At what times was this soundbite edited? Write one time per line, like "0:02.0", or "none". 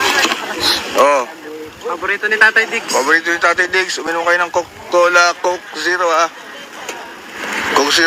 none